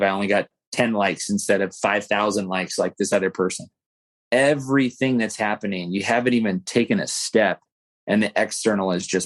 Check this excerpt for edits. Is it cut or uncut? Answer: uncut